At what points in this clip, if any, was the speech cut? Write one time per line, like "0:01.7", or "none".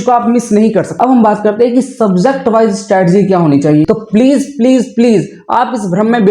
0:01.0
0:03.8